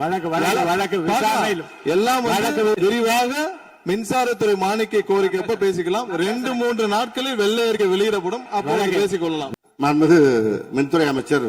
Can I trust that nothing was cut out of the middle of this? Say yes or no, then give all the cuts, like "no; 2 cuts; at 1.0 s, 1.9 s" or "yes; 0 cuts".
no; 1 cut; at 9.5 s